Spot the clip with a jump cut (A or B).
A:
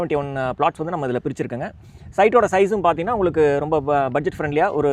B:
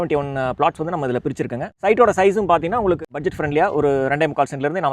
B